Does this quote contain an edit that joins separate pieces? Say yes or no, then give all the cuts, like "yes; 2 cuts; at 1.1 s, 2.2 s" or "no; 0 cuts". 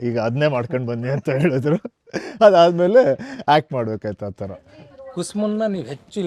no; 0 cuts